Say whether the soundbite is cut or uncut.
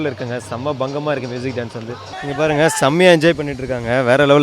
cut